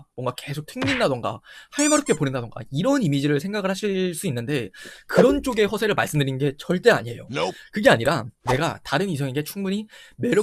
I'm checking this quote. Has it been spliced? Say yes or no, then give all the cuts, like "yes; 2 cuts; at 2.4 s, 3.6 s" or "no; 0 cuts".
no; 0 cuts